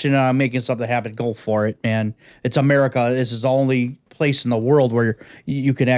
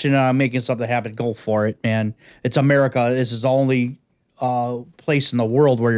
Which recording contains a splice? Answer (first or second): first